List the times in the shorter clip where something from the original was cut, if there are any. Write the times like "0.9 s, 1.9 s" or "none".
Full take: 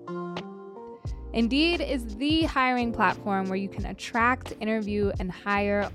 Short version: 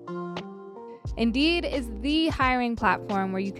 1.1 s